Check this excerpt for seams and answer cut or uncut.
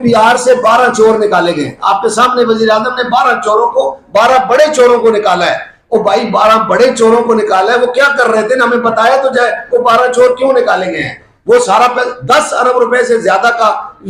uncut